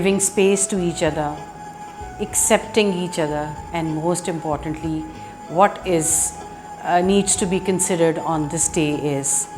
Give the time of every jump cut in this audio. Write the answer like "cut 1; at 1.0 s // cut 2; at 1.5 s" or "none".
none